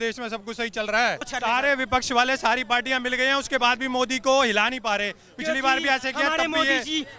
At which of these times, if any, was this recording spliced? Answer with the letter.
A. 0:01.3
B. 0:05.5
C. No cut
A